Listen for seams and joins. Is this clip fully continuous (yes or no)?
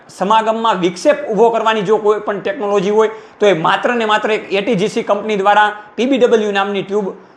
yes